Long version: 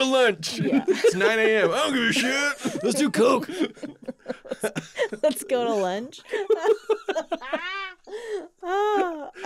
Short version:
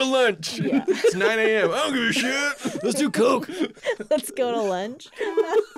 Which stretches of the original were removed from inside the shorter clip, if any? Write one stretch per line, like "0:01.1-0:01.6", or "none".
0:03.8-0:04.9